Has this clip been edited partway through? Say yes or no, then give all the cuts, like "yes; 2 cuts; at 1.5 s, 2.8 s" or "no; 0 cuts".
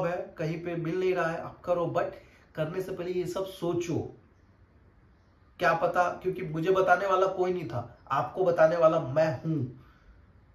no; 0 cuts